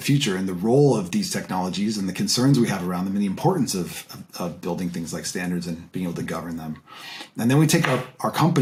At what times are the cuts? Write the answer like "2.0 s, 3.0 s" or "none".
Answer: none